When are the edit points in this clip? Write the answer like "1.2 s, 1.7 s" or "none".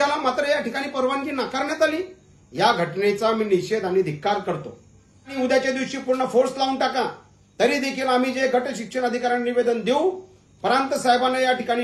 5.3 s